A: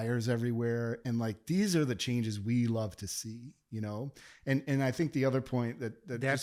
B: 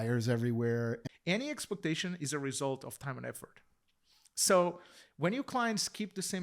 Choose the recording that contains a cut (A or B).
B